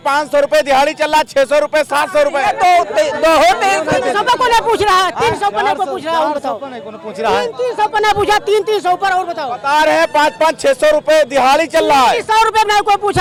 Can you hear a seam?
no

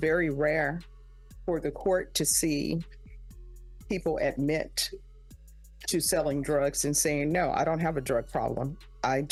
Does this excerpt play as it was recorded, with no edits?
yes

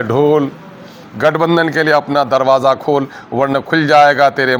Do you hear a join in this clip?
no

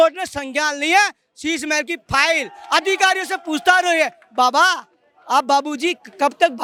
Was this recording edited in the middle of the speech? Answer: no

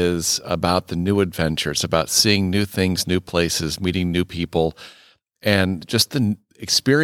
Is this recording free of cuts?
yes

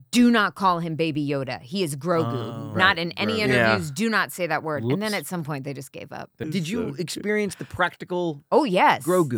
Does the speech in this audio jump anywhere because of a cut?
yes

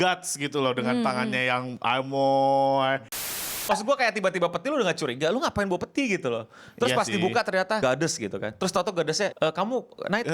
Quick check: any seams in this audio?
yes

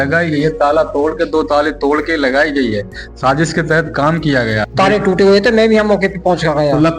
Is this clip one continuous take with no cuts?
no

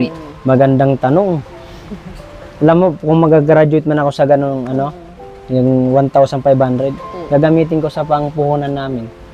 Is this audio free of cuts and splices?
yes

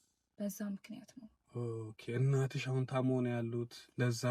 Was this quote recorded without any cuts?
yes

